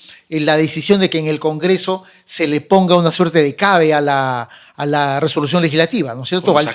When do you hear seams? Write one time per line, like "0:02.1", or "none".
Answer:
none